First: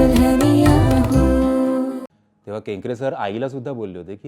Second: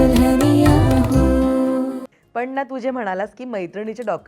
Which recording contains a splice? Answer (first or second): first